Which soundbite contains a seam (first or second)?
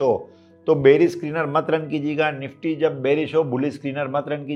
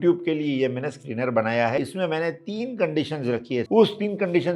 second